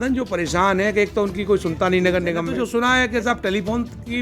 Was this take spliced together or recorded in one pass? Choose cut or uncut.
cut